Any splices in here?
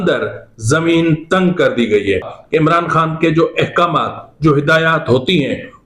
yes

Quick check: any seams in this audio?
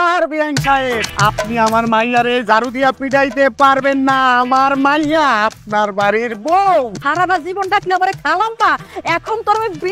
yes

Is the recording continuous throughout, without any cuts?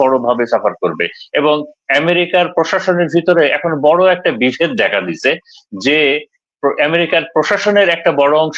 yes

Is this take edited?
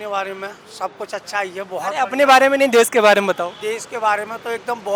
no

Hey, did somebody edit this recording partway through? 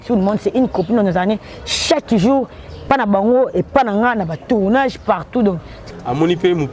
yes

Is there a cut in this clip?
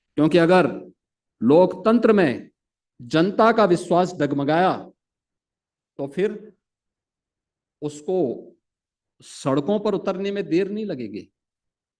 no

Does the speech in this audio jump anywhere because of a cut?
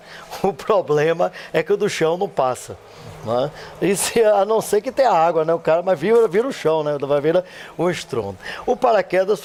no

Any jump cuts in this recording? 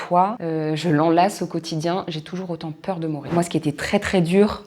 yes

